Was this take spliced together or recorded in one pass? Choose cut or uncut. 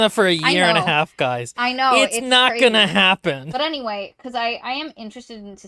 uncut